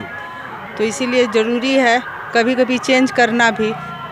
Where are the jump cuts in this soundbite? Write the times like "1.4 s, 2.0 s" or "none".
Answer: none